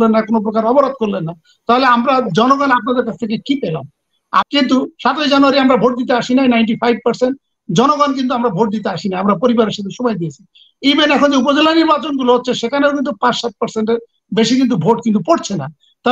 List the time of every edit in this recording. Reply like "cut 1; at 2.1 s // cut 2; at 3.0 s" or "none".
cut 1; at 4.5 s